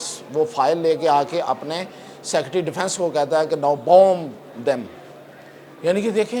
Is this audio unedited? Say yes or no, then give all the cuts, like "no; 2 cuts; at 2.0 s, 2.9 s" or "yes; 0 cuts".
yes; 0 cuts